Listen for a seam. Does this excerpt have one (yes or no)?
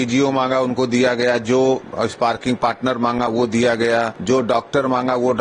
yes